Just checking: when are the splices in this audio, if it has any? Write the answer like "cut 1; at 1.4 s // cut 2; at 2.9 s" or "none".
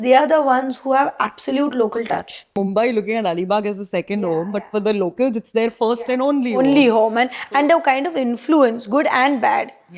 cut 1; at 2.5 s